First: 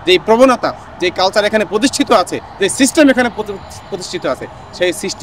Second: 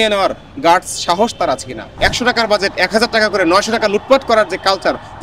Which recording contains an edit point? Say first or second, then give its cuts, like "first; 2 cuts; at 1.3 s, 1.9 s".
second; 1 cut; at 2.0 s